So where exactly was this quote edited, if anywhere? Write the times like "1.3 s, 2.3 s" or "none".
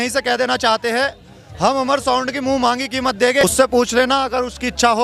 3.4 s